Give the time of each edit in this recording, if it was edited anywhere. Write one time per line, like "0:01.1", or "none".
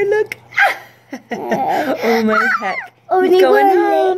none